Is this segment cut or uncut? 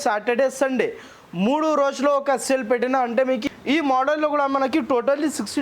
cut